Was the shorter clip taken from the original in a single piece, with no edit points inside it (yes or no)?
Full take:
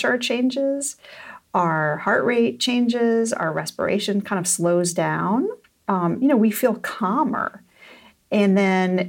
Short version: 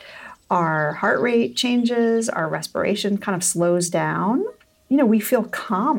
no